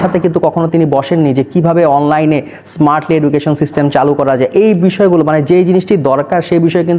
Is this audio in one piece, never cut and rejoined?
yes; 0 cuts

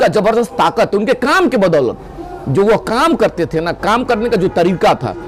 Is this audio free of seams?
yes; 0 cuts

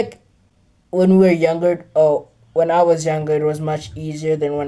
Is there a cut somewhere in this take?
no; 0 cuts

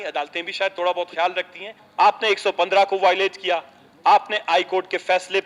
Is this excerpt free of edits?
no; 1 cut; at 1.8 s

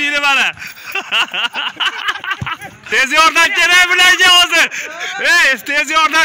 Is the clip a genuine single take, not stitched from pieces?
no; 1 cut; at 2.9 s

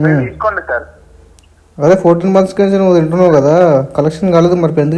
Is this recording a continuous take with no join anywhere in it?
yes; 0 cuts

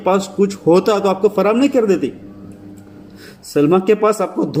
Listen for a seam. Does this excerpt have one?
no; 0 cuts

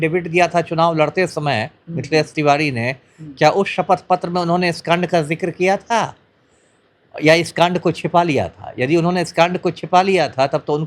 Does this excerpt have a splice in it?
no; 0 cuts

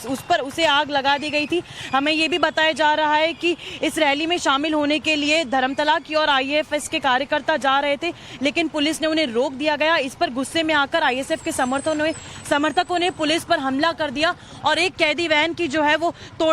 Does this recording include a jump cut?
no; 0 cuts

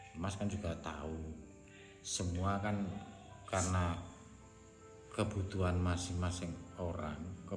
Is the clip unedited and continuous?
yes; 0 cuts

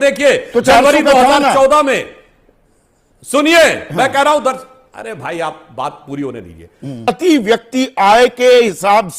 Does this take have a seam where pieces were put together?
yes; 1 cut; at 7.1 s

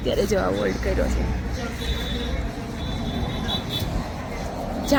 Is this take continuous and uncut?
yes; 0 cuts

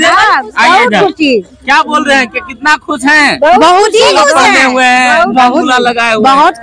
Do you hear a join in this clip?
no; 0 cuts

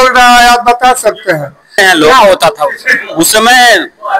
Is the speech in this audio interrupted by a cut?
yes; 1 cut; at 1.8 s

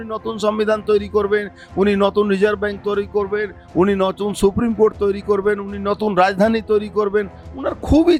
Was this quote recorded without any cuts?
yes; 0 cuts

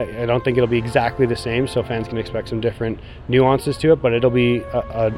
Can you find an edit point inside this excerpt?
no; 0 cuts

